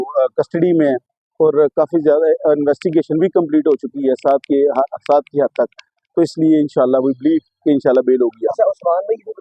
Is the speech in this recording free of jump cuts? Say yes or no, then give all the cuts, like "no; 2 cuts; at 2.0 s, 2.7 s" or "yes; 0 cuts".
yes; 0 cuts